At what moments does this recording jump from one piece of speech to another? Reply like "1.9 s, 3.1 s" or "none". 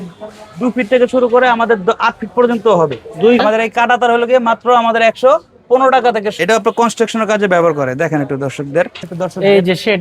3.4 s, 6.4 s, 9.1 s